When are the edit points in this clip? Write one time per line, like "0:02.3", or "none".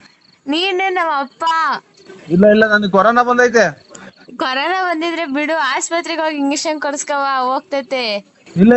none

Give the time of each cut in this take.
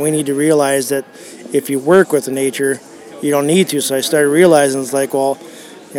none

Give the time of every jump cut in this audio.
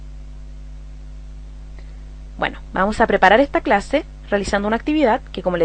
0:01.5

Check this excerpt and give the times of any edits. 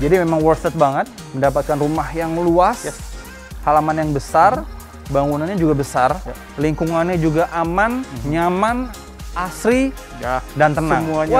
0:01.2

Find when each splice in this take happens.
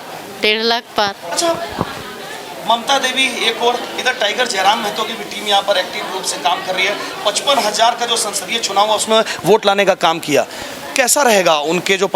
none

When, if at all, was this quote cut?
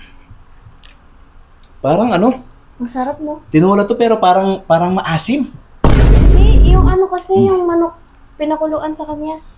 none

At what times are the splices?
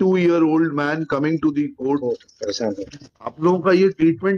0:02.8

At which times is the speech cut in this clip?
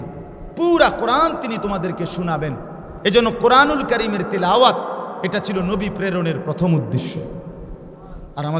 none

